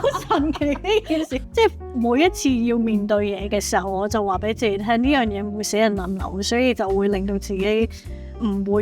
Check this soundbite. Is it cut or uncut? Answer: cut